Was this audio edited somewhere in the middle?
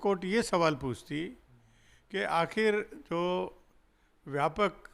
no; 0 cuts

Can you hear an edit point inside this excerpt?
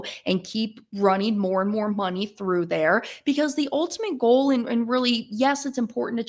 no; 0 cuts

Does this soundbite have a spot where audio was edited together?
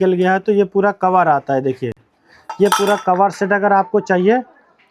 no; 0 cuts

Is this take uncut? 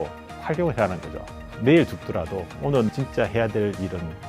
no; 2 cuts; at 1.3 s, 2.9 s

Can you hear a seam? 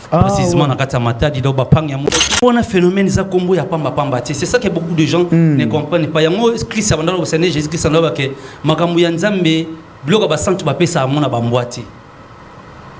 yes; 1 cut; at 2.4 s

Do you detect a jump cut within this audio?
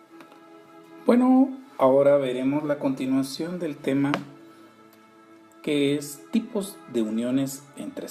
no; 0 cuts

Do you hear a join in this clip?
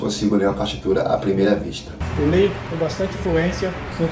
no; 0 cuts

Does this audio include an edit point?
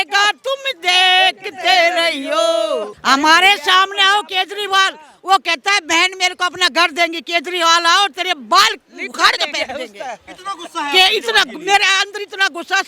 yes; 1 cut; at 2.9 s

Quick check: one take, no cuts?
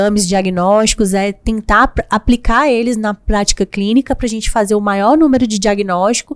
yes; 0 cuts

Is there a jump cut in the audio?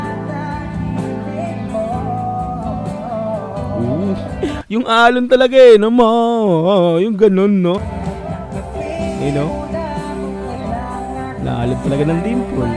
yes; 1 cut; at 7.8 s

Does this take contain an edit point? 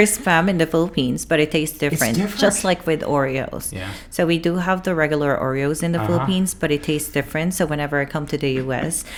no; 0 cuts

